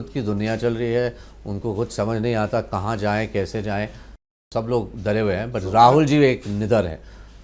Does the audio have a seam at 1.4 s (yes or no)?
no